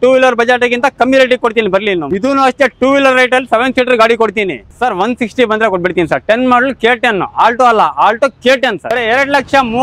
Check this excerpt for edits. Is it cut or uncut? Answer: cut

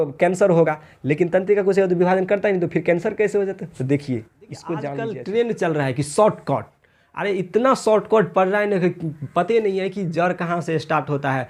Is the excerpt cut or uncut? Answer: cut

